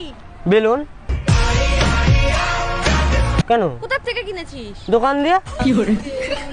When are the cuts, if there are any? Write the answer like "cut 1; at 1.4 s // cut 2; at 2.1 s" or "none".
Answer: cut 1; at 3.4 s